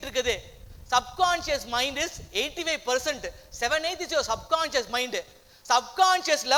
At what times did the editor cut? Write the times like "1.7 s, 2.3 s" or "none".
none